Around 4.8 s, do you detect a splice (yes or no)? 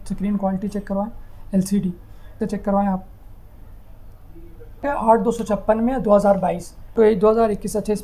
yes